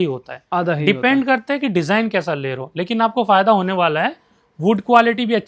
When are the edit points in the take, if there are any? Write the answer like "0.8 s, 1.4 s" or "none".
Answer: none

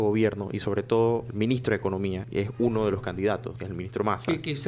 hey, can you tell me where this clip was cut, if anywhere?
1.3 s, 2.2 s, 3.6 s

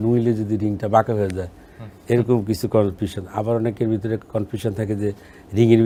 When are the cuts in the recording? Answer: none

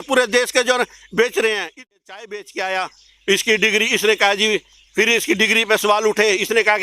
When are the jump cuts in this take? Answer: 1.9 s

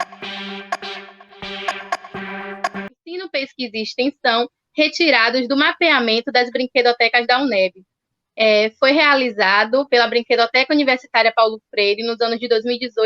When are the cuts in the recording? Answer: 3.3 s

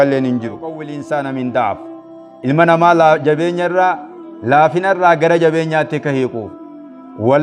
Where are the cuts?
0.9 s

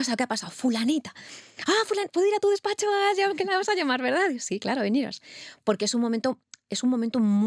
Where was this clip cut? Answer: none

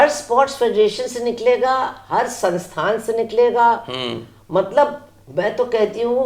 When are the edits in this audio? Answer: none

